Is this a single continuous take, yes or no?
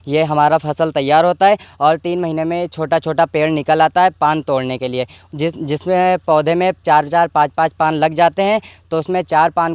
yes